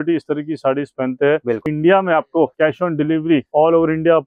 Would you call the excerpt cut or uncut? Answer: cut